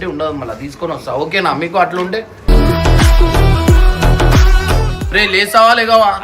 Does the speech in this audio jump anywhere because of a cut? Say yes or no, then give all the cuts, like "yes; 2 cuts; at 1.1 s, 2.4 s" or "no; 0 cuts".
yes; 1 cut; at 5.0 s